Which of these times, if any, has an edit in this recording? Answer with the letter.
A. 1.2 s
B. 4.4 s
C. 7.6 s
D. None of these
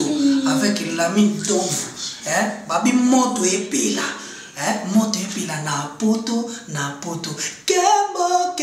D